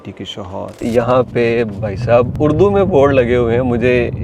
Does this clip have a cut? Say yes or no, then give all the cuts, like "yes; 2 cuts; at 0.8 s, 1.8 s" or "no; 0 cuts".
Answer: yes; 2 cuts; at 0.8 s, 2.3 s